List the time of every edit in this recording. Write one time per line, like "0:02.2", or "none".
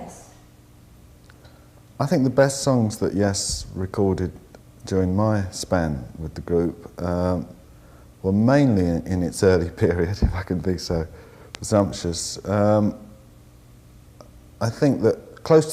0:12.1